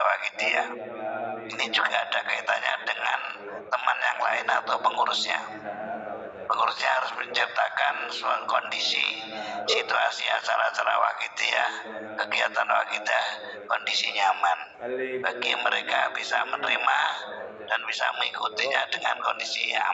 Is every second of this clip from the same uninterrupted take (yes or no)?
yes